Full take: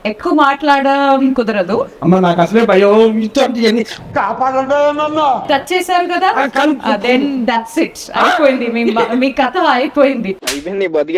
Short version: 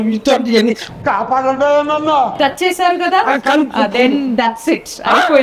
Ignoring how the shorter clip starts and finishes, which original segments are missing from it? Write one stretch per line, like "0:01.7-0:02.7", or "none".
none

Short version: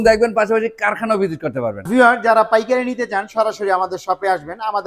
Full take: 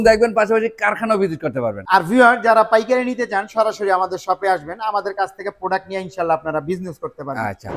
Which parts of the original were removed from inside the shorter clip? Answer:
0:01.8-0:02.1

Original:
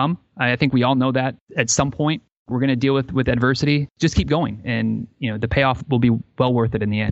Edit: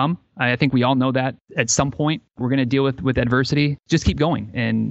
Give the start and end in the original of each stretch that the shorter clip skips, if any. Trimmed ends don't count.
0:02.3-0:02.4

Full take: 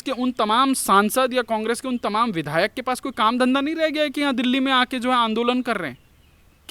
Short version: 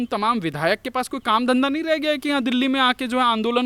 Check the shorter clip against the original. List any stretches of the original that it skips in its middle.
none

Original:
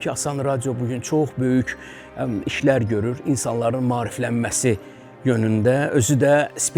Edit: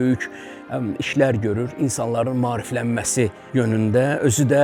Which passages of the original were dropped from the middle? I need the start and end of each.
0:04.9-0:05.1

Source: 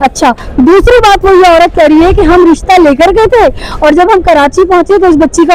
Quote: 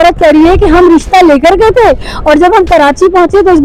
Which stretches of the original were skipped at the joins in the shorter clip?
none

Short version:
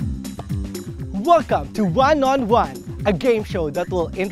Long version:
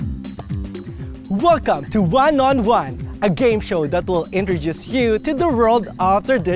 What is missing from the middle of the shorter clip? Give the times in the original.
0:01.1-0:01.3

